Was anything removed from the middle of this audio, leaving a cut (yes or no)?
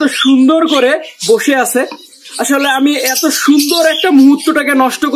no